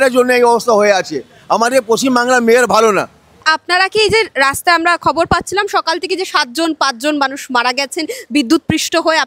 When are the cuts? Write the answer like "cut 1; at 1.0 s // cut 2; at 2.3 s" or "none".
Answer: none